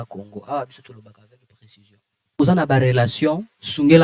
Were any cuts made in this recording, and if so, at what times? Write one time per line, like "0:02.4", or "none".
0:02.4